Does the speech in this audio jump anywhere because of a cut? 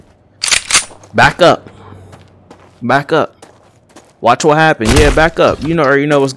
no; 0 cuts

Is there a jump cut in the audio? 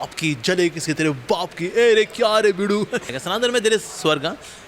yes; 1 cut; at 3.1 s

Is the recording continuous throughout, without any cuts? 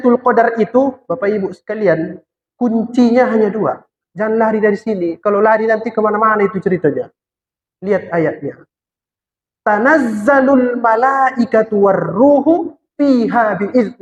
yes; 0 cuts

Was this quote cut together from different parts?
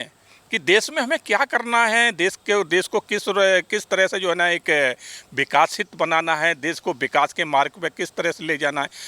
no; 0 cuts

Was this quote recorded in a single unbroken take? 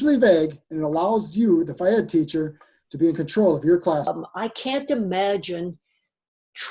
no; 1 cut; at 4.1 s

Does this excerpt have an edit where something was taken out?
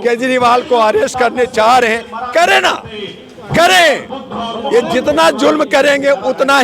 no; 0 cuts

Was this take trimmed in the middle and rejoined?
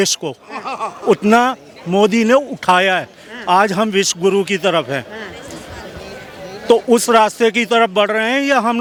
no; 0 cuts

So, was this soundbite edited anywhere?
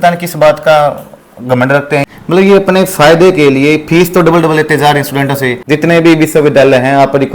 yes; 2 cuts; at 2.0 s, 5.6 s

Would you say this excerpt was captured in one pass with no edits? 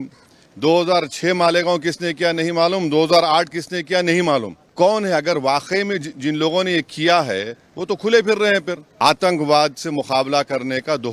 no; 2 cuts; at 4.6 s, 8.9 s

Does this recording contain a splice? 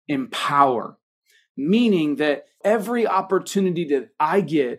yes; 1 cut; at 2.6 s

